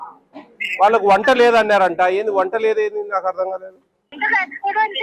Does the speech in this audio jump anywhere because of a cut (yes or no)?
yes